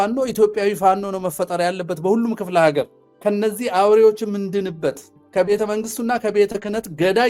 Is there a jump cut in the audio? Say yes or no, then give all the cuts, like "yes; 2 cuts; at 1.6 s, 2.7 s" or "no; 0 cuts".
yes; 1 cut; at 3.0 s